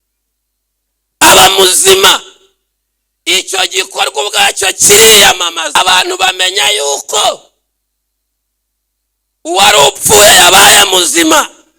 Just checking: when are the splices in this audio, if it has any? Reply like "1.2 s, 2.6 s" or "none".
5.8 s